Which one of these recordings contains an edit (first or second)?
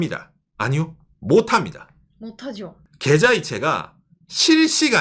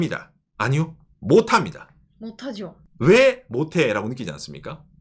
first